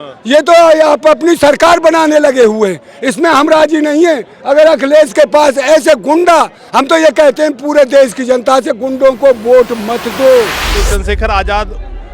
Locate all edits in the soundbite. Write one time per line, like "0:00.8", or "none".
0:10.6